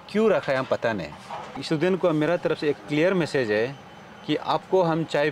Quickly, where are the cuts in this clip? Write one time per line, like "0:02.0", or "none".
0:01.6

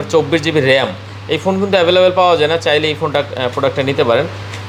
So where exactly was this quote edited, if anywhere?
none

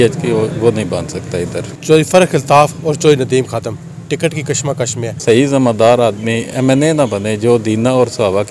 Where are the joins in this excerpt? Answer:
0:01.7
0:05.1

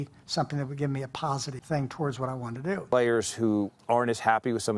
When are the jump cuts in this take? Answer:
0:02.8

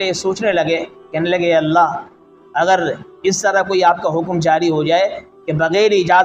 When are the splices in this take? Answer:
0:01.1

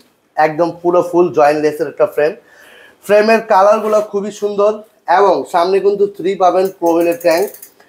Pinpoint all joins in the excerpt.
none

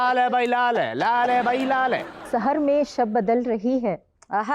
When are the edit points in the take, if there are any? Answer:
0:02.3

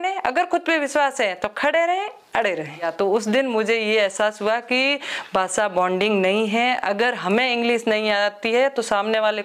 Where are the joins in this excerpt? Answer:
0:02.9

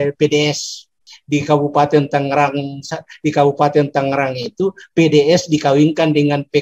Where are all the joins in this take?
0:01.1

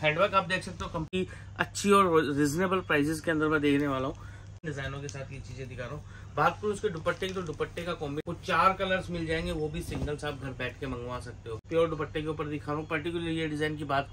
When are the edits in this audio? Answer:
0:01.1
0:04.5
0:08.2
0:11.6

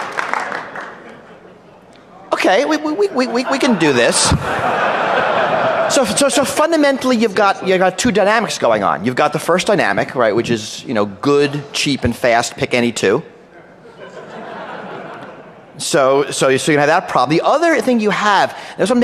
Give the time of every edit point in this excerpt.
0:13.2

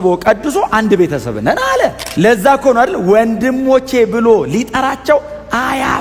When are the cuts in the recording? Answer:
0:02.0

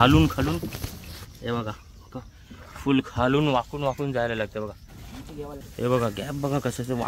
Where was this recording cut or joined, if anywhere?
0:05.6

